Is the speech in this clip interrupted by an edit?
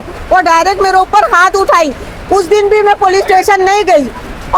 no; 0 cuts

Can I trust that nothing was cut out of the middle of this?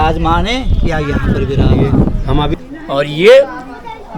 no; 1 cut; at 2.5 s

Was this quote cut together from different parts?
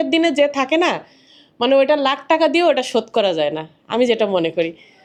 no; 0 cuts

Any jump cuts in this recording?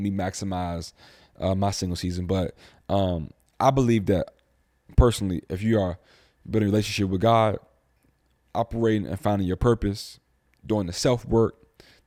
no; 0 cuts

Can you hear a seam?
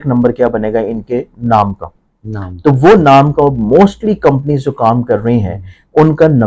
no; 0 cuts

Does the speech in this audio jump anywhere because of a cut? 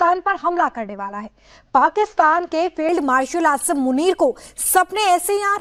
no; 0 cuts

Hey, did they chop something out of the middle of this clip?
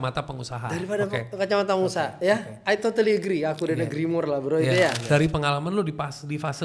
yes; 1 cut; at 5.0 s

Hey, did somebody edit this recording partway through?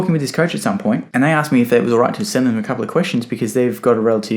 yes; 1 cut; at 1.1 s

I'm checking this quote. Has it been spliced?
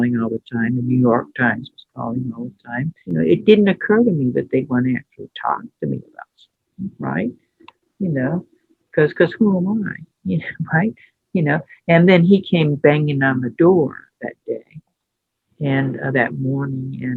no; 0 cuts

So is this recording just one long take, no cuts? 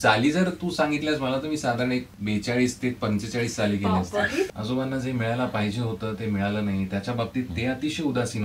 no; 2 cuts; at 2.1 s, 4.5 s

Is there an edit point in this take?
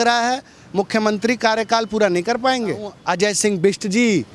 yes; 1 cut; at 2.9 s

